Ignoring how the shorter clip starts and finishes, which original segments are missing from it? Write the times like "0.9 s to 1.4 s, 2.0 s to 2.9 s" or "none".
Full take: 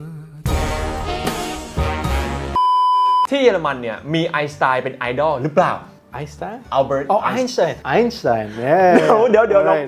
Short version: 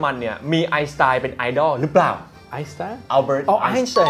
none